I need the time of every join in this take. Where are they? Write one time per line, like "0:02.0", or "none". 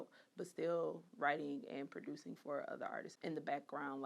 0:03.1